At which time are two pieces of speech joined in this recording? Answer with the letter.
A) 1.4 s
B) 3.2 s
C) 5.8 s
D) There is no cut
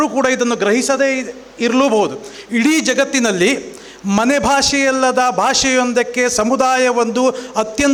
D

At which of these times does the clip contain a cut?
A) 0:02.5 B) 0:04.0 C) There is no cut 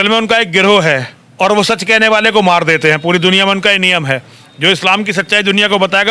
C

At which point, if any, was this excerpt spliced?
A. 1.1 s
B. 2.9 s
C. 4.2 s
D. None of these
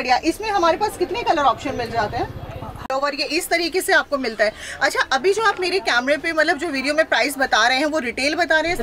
B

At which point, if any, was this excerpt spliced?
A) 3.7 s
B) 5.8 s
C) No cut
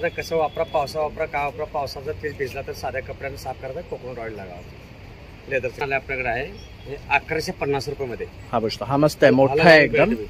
B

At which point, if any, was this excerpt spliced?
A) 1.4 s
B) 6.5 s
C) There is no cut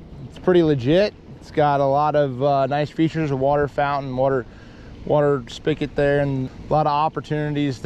B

